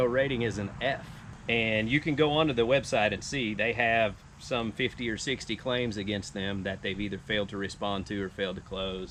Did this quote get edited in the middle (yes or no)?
no